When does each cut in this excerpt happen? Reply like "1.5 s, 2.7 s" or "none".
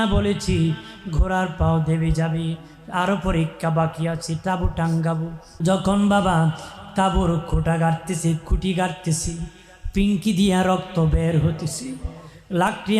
5.6 s